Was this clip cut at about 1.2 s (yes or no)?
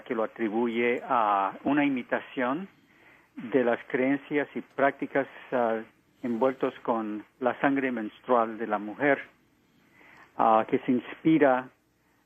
yes